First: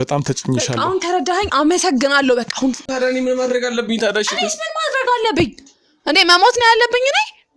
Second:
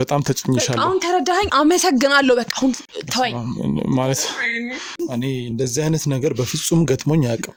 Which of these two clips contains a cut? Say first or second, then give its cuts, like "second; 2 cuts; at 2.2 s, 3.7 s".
first; 1 cut; at 2.8 s